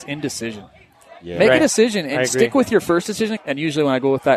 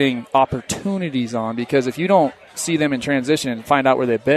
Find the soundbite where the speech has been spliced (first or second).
first